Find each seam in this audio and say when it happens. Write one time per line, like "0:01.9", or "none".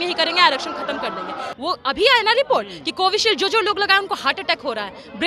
0:01.4